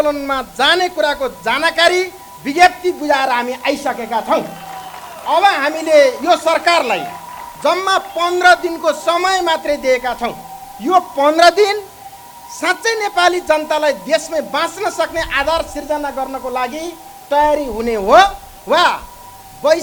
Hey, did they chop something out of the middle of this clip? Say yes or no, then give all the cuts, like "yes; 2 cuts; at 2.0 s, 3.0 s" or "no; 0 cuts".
no; 0 cuts